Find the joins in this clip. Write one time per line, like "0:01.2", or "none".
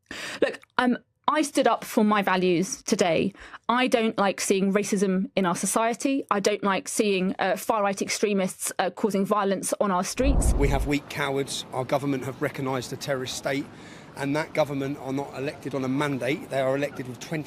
0:10.5